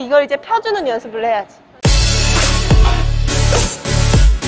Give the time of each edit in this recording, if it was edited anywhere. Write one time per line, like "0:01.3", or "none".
0:01.6